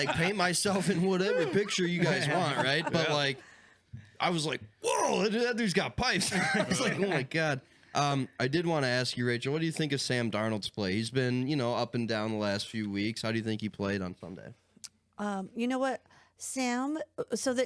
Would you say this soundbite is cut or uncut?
uncut